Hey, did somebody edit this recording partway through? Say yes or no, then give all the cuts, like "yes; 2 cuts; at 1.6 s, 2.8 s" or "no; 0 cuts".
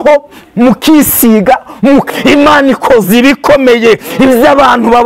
yes; 1 cut; at 2.1 s